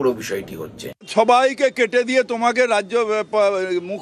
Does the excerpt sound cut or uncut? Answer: cut